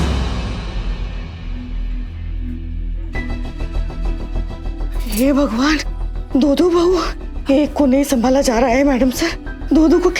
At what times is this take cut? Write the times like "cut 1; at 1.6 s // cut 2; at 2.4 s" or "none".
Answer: none